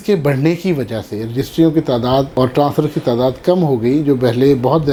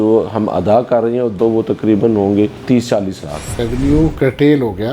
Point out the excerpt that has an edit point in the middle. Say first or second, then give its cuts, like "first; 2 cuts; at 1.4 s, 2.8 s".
second; 2 cuts; at 1.3 s, 3.6 s